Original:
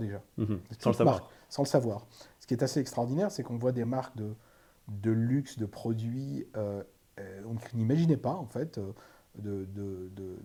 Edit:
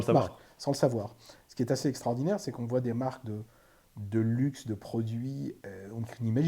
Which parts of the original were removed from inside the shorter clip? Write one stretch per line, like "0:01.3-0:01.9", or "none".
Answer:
0:06.5-0:07.1